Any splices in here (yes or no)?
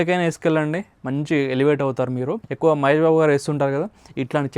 yes